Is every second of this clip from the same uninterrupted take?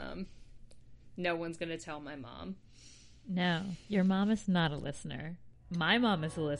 no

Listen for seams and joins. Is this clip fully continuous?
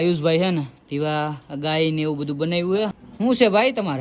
no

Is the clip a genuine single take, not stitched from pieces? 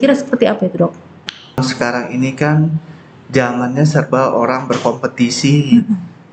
no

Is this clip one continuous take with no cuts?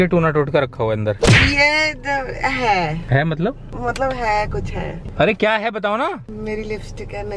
yes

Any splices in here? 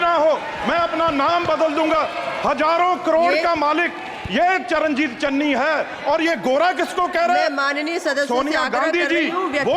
no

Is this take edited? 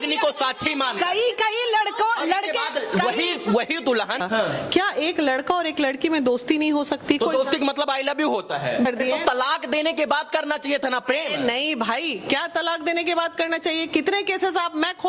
yes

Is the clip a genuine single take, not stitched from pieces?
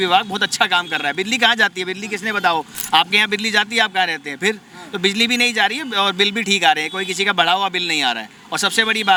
yes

